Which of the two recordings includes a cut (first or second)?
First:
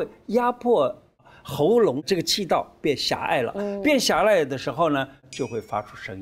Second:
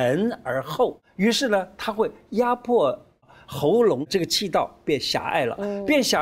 second